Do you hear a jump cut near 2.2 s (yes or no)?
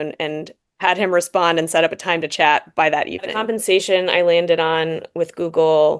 no